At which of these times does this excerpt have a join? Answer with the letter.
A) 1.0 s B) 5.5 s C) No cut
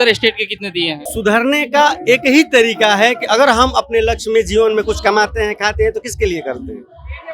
A